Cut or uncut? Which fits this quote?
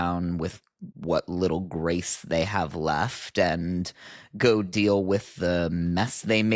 uncut